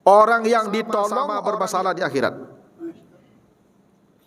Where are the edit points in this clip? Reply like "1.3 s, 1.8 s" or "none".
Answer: 1.3 s